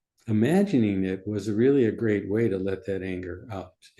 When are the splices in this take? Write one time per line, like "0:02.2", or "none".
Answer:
none